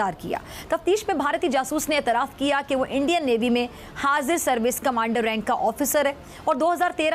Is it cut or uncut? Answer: uncut